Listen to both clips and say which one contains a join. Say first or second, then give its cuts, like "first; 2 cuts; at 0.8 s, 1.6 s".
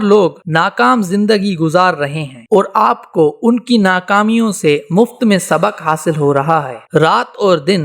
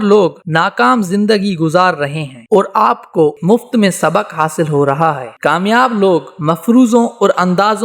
second; 2 cuts; at 3.4 s, 5.3 s